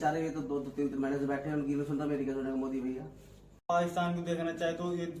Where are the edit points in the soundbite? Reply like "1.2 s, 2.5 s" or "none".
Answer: 3.6 s